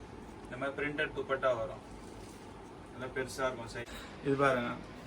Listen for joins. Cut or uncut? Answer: cut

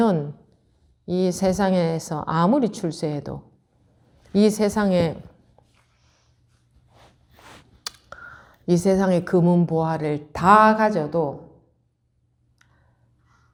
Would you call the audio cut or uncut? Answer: uncut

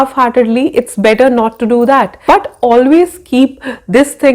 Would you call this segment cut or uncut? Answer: cut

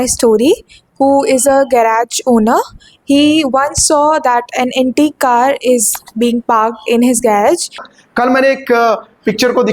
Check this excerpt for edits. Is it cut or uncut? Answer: cut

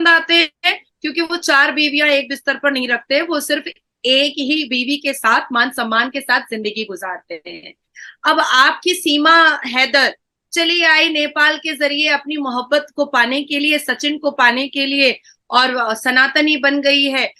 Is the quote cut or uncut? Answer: uncut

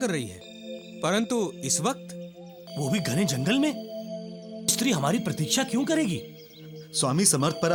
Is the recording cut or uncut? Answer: uncut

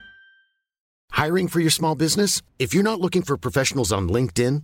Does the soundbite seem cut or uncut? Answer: cut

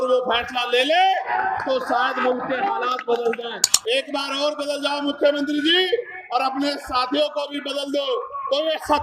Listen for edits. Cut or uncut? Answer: cut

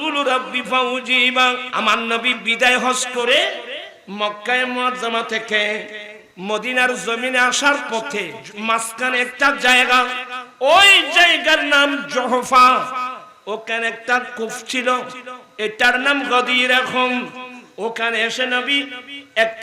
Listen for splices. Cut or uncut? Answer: cut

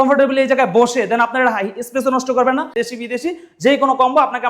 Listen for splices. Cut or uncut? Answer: cut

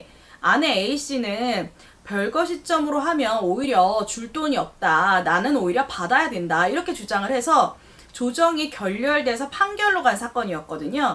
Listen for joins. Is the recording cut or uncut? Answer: uncut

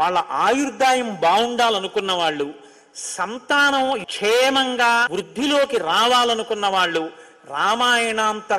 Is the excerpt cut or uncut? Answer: cut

